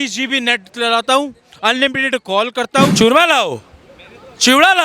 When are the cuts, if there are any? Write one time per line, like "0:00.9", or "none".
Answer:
0:02.9